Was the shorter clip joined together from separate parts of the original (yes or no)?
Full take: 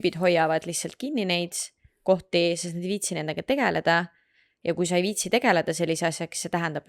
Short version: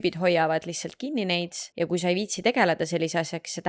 yes